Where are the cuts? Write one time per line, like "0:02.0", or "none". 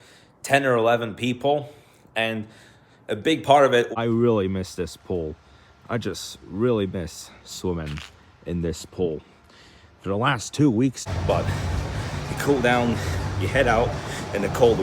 0:03.9
0:11.0

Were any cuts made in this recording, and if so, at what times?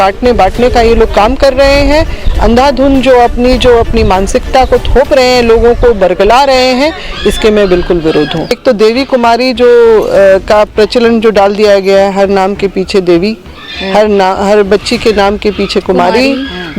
0:08.6

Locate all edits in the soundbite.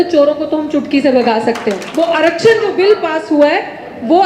0:01.8

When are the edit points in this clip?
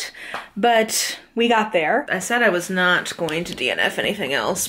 0:02.1

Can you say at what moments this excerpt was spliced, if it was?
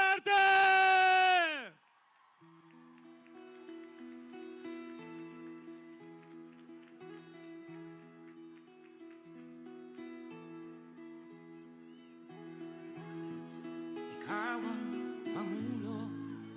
none

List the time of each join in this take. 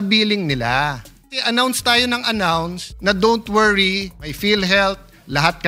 0:01.4
0:02.8
0:04.2

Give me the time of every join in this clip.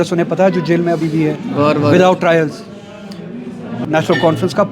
0:03.8

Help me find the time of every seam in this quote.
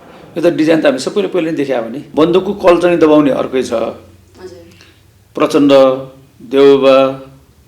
0:02.0

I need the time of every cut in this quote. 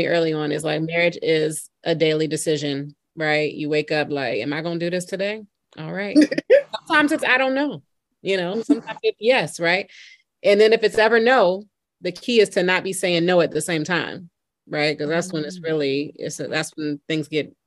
none

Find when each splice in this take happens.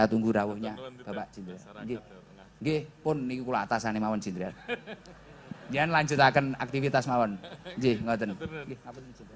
none

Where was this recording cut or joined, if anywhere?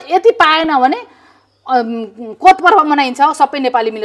none

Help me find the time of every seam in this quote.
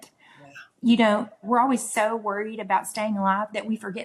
0:01.4

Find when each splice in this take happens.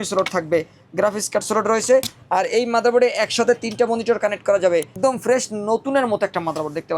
0:04.9

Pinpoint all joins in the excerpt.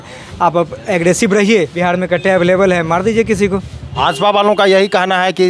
0:01.7
0:04.0

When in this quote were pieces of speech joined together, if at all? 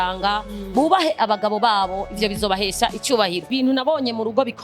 0:03.5

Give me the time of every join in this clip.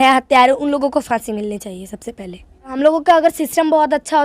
0:02.7

